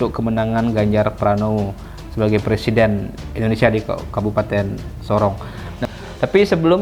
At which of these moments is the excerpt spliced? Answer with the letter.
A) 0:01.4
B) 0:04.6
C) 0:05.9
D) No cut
C